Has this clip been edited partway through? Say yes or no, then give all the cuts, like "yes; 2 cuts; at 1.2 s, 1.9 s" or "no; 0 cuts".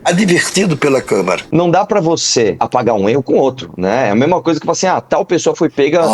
yes; 2 cuts; at 1.4 s, 2.6 s